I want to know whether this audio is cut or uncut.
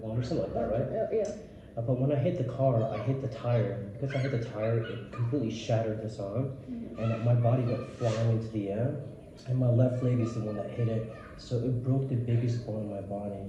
uncut